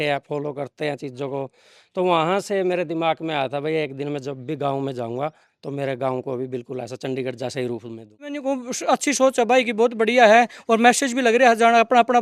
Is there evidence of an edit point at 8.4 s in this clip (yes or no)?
yes